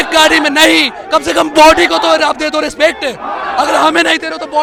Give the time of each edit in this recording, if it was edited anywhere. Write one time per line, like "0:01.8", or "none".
none

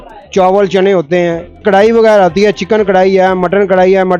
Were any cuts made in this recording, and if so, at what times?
0:01.6

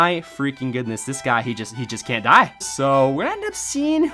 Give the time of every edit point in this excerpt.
0:02.7

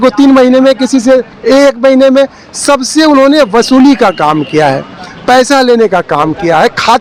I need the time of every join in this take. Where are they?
none

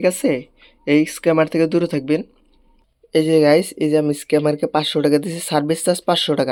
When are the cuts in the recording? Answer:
none

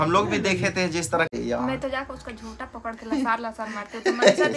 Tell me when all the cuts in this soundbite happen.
0:01.3

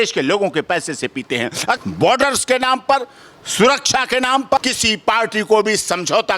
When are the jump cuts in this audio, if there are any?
0:01.8
0:04.6

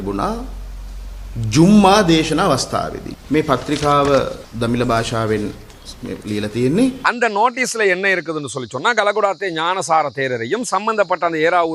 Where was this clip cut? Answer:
0:07.0

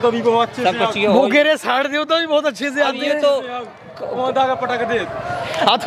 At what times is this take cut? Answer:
none

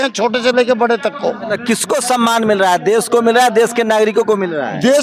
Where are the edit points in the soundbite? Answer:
0:01.5

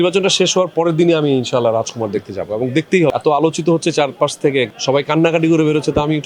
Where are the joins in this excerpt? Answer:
none

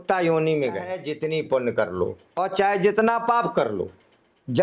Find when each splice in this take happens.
0:01.1

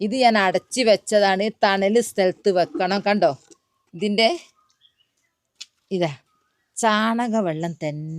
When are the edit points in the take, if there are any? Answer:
none

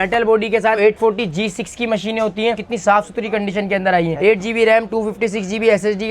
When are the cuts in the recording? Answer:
0:00.8
0:02.7
0:04.2

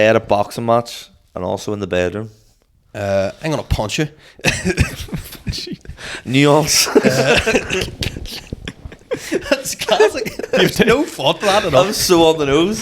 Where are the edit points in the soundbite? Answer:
none

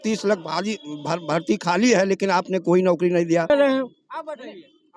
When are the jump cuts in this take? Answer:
0:03.5

